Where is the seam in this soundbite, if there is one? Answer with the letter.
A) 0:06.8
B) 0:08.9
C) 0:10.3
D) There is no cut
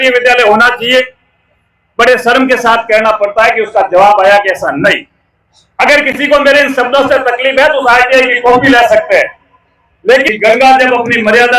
C